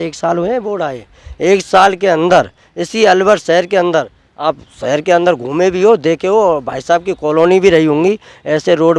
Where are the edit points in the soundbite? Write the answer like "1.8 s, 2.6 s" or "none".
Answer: none